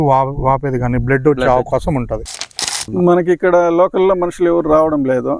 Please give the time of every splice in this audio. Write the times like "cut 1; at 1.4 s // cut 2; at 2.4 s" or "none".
cut 1; at 2.4 s

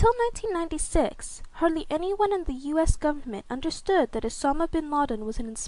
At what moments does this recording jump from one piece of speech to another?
none

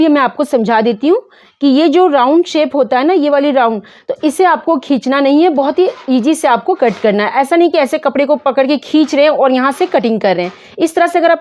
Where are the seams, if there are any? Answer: none

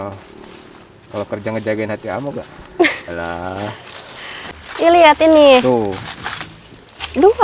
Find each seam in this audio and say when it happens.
cut 1; at 4.4 s

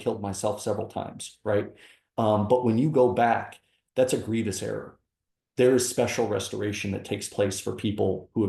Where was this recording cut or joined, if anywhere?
none

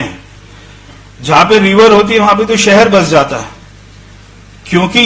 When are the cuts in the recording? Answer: none

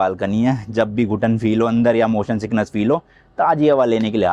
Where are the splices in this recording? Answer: none

